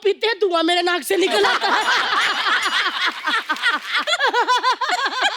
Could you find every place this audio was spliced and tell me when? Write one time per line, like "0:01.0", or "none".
0:04.0

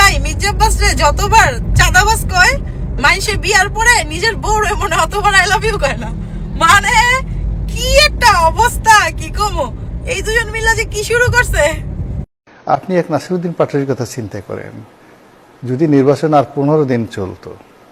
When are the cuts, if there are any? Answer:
none

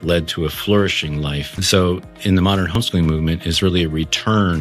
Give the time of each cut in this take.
0:01.5
0:02.7

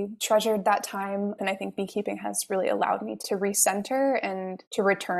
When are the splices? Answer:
0:01.4

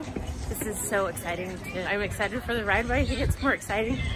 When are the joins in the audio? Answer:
none

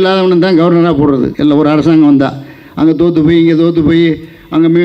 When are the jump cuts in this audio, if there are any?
0:01.3

